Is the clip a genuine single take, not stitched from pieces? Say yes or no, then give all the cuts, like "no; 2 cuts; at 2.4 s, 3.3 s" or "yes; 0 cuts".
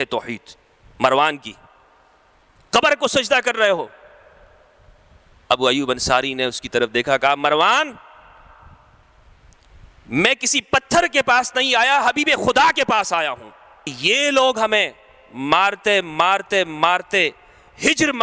no; 1 cut; at 13.9 s